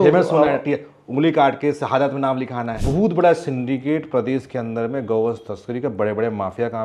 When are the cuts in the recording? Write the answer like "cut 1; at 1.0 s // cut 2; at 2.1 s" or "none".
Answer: cut 1; at 2.8 s